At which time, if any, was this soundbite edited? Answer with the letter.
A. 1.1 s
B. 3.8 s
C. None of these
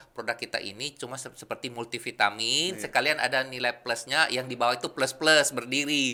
C